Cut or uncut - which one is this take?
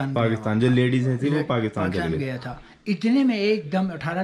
uncut